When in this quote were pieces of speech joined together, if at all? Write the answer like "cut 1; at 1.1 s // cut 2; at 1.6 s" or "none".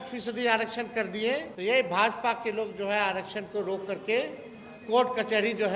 cut 1; at 1.5 s